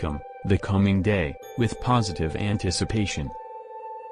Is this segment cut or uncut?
cut